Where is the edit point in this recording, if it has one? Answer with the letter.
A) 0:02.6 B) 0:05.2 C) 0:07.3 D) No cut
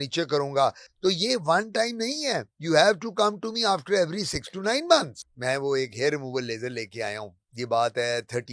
B